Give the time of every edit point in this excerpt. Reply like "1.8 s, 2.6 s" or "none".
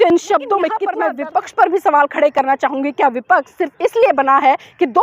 0.9 s